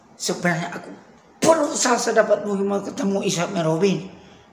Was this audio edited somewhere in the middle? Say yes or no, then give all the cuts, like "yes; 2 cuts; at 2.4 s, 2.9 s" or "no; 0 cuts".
no; 0 cuts